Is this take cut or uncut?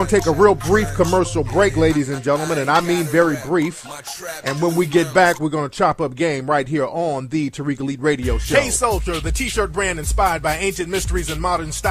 cut